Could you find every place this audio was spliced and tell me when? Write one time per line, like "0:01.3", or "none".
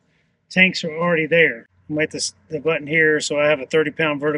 0:01.7